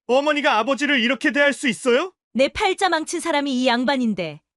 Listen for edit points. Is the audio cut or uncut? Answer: cut